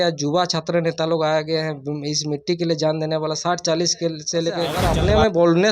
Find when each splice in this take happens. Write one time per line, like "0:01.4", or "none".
0:04.8